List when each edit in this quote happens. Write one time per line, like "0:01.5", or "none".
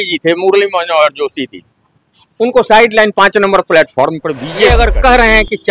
0:04.7

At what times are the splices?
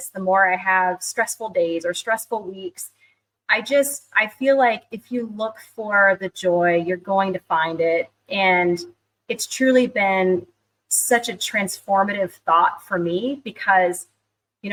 none

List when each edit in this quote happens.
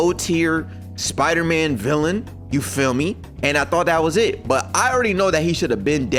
none

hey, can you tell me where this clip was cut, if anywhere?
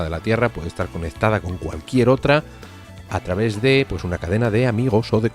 0:04.4

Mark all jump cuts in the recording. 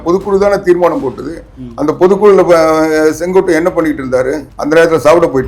0:04.5

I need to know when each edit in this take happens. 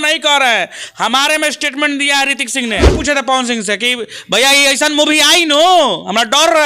0:03.0

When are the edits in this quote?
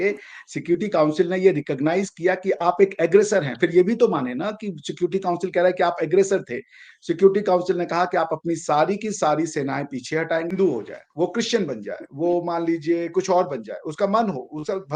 0:10.5

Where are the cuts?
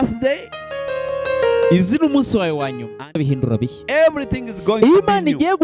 0:03.1

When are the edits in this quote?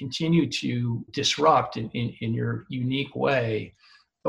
0:01.1

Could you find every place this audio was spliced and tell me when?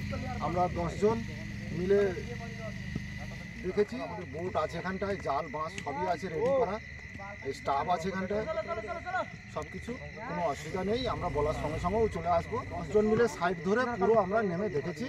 0:04.2
0:12.7

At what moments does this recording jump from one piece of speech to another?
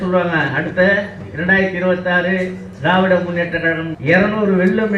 0:03.9

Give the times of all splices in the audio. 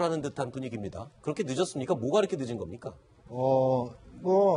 0:01.8

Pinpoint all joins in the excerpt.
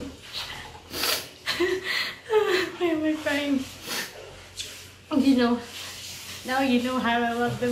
none

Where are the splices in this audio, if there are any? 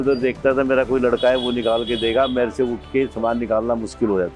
none

